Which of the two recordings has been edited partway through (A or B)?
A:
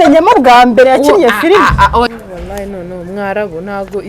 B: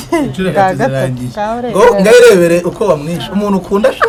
A